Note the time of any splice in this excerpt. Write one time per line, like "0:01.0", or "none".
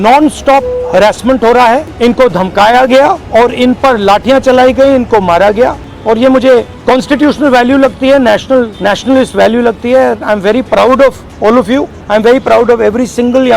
0:01.9
0:03.2
0:05.9
0:06.7
0:08.7
0:11.6

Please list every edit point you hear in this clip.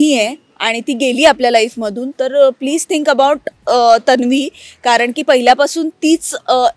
none

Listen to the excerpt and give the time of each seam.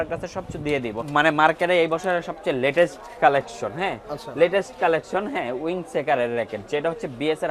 0:01.0

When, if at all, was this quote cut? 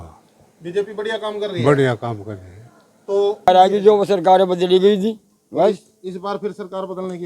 0:03.5

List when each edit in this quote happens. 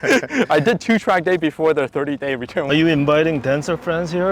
0:02.7

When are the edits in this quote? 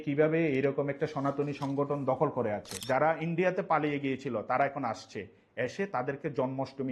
0:02.7

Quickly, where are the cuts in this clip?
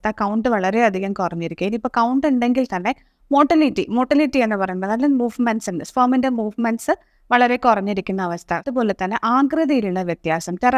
0:08.7

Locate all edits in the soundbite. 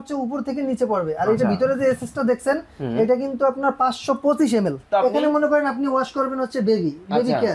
0:04.8

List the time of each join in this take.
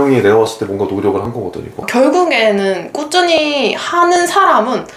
0:01.9

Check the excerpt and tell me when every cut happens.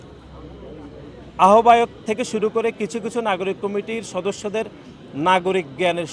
none

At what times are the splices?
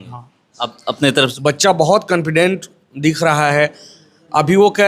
0:01.4

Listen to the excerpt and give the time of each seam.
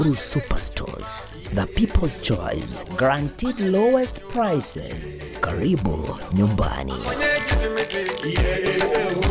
0:07.0

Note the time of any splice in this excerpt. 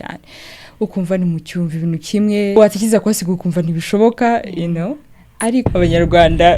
0:02.6
0:05.7

